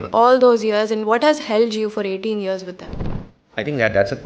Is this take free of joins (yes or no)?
yes